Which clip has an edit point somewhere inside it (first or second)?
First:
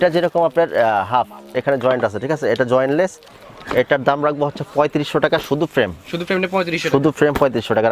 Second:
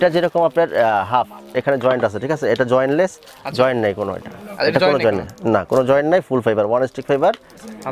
first